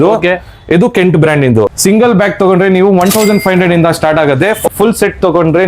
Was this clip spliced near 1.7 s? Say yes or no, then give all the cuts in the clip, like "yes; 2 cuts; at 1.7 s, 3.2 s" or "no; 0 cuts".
yes; 2 cuts; at 1.7 s, 4.7 s